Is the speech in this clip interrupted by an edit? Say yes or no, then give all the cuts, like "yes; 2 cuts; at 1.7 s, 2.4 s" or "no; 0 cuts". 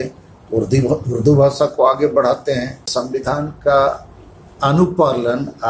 yes; 1 cut; at 3.0 s